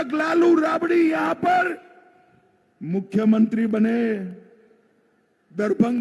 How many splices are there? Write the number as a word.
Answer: zero